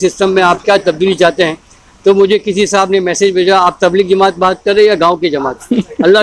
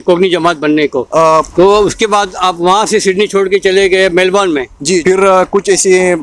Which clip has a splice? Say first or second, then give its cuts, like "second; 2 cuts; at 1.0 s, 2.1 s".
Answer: second; 2 cuts; at 1.4 s, 5.0 s